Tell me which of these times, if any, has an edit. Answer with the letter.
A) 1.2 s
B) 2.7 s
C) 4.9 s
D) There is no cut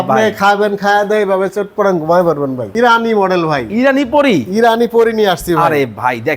B